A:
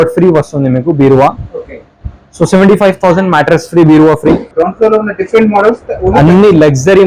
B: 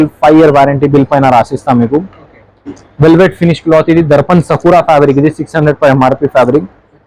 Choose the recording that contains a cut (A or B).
A